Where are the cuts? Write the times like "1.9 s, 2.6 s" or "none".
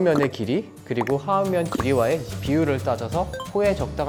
none

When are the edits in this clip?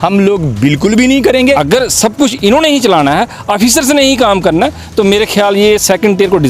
1.6 s

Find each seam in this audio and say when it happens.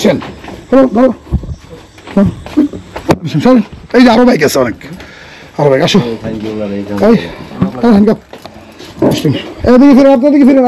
none

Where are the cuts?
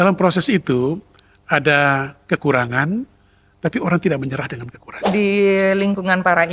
4.9 s

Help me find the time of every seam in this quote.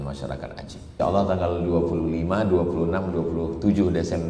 0.9 s

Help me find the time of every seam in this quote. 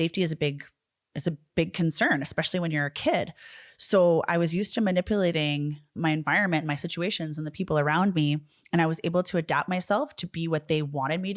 none

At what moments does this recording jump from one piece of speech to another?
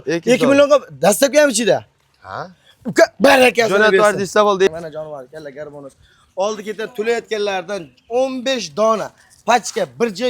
4.7 s

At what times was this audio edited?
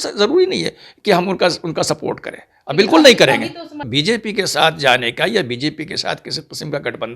3.8 s

